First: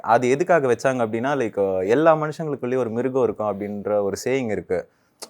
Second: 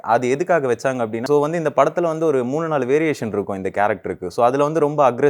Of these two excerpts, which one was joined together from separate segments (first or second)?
second